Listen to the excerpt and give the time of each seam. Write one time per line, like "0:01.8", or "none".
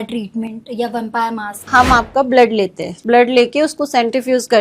0:01.6
0:02.9